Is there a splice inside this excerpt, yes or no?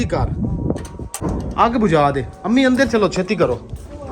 yes